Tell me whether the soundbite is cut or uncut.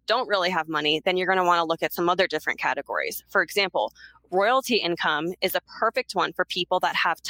uncut